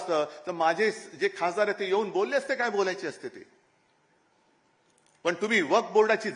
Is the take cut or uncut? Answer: uncut